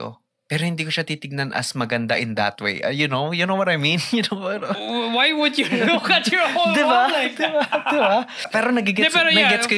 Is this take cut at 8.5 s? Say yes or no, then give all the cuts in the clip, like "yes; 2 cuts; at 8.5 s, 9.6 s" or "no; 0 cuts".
yes; 1 cut; at 8.5 s